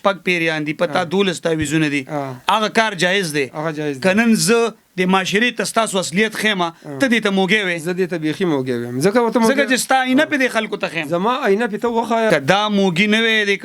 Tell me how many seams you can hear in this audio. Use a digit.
1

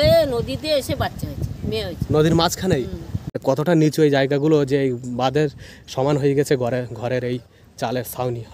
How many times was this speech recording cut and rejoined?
1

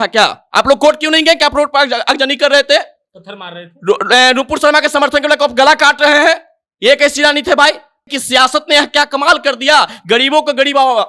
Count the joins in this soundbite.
1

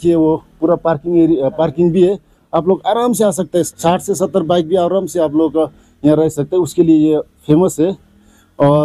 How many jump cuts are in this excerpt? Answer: 1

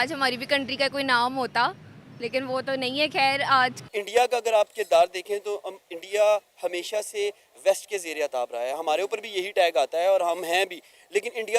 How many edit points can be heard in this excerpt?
1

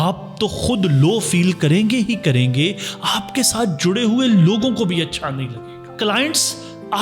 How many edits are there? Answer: 1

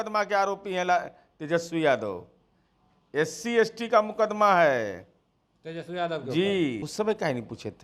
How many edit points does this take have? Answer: 1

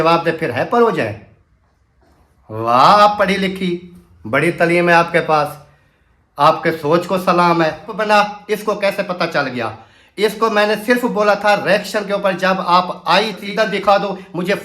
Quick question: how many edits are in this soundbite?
2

